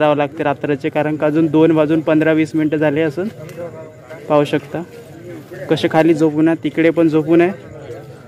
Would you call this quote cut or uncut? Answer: uncut